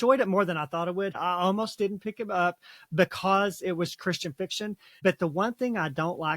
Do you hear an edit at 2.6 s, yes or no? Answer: no